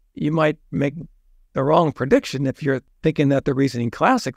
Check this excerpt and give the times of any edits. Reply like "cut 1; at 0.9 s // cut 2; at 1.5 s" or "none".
cut 1; at 2.9 s